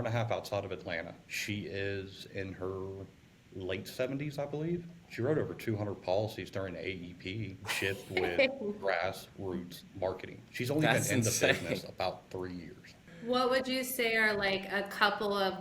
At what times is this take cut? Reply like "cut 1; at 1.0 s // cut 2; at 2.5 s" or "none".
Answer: cut 1; at 1.3 s // cut 2; at 5.0 s // cut 3; at 7.6 s // cut 4; at 10.4 s // cut 5; at 13.1 s